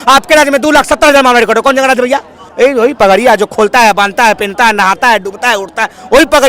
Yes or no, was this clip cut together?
yes